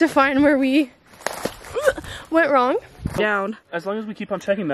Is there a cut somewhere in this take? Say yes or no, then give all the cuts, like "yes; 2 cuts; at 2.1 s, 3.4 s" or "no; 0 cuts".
yes; 1 cut; at 3.2 s